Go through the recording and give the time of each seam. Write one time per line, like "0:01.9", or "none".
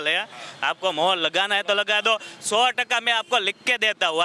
none